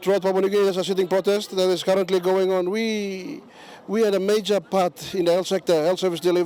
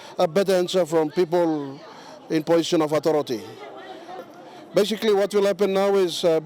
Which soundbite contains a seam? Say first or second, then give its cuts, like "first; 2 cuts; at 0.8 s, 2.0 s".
second; 1 cut; at 4.2 s